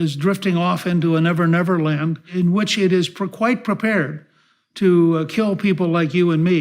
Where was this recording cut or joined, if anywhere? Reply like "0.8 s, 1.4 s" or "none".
2.3 s